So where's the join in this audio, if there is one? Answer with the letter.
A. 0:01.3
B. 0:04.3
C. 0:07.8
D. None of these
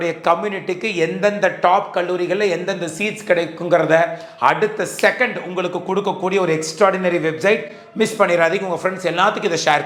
D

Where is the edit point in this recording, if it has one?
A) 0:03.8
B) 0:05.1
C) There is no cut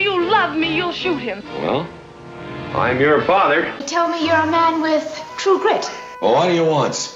A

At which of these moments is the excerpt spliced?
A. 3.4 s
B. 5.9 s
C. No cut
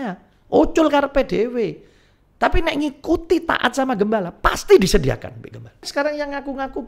B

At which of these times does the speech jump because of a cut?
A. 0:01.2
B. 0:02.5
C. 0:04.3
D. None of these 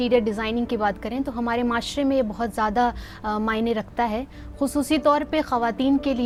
D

